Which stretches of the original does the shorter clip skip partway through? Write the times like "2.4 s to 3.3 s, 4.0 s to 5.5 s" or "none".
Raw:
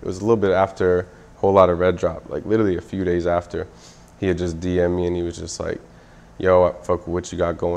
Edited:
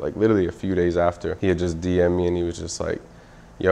3.6 s to 4.1 s